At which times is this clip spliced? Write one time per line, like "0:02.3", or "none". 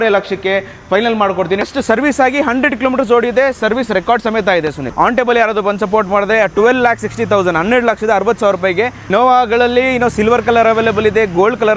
0:01.7
0:04.8
0:09.1